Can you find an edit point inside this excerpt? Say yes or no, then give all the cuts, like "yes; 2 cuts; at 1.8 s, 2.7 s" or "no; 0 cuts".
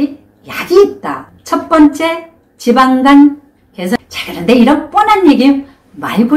yes; 2 cuts; at 1.1 s, 4.0 s